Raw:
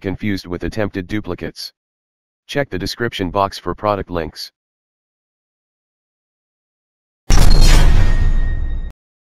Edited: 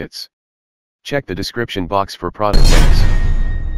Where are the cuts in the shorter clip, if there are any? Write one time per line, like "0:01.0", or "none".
0:02.5